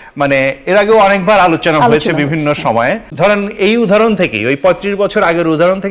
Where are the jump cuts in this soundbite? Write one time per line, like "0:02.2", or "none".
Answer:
0:03.1